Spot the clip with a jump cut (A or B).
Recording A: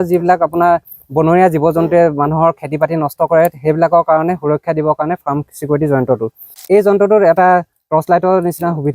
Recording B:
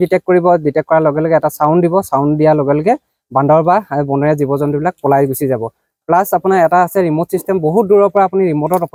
A